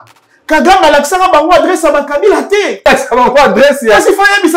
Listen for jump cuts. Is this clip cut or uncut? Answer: cut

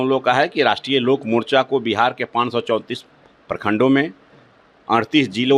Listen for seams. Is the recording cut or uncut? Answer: uncut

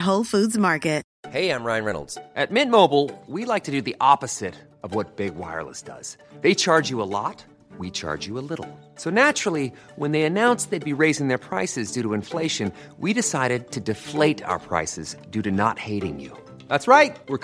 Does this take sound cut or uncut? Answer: cut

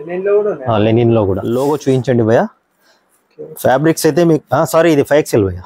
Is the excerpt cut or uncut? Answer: cut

